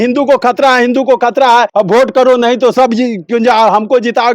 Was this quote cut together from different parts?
yes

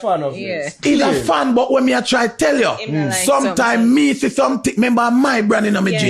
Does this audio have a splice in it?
no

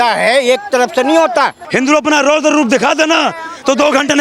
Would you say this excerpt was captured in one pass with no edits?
no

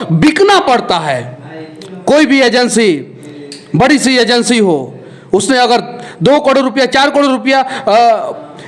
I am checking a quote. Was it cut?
no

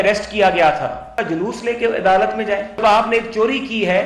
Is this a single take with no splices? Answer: no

